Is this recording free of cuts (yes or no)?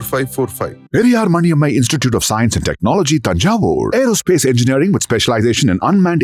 yes